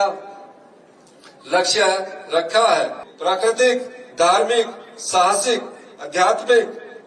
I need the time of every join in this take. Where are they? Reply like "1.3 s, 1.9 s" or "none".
3.0 s